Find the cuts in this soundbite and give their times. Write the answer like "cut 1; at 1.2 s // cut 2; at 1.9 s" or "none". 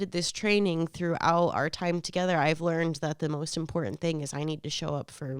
none